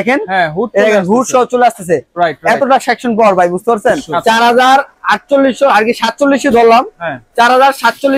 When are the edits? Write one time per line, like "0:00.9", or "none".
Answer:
0:04.1